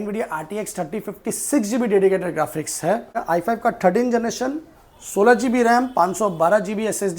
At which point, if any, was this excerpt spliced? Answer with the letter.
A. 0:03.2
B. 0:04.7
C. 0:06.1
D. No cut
A